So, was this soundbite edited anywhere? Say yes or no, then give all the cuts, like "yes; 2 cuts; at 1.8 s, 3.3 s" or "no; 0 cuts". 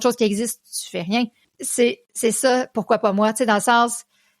yes; 1 cut; at 1.4 s